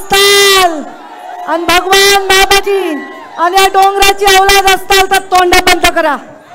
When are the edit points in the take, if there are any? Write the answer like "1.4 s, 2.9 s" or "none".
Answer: 2.7 s